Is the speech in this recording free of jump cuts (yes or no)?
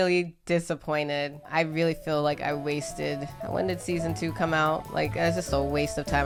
yes